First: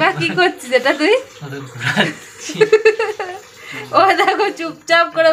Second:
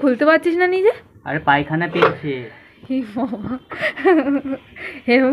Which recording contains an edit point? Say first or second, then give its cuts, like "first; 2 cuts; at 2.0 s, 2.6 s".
second; 1 cut; at 2.7 s